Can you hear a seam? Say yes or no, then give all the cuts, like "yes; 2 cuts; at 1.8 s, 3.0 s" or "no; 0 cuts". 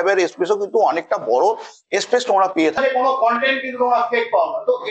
yes; 1 cut; at 2.8 s